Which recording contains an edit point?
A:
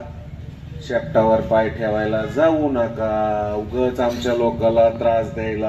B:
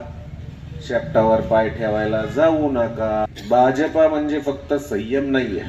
B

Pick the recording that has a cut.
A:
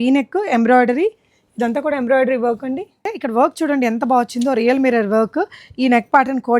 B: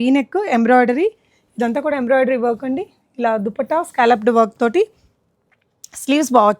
A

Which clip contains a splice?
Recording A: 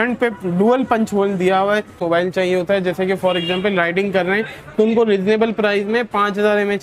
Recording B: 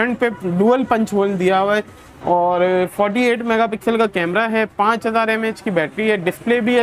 A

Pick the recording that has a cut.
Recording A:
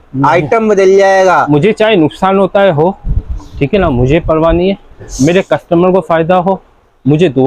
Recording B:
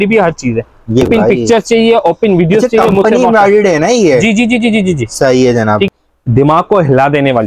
B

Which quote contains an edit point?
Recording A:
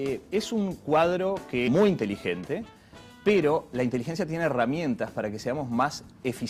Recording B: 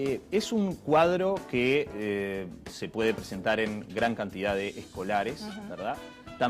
B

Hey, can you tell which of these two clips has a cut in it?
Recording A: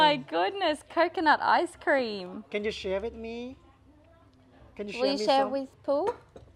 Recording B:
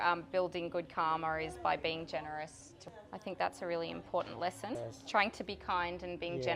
B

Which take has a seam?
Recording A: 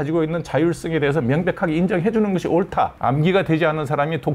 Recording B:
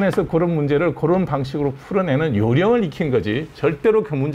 A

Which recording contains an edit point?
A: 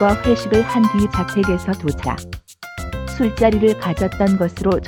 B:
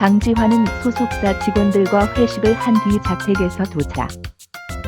B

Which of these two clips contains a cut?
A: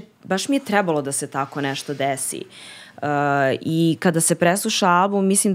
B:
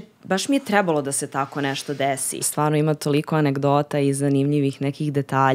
B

